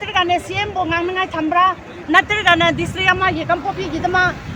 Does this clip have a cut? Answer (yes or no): no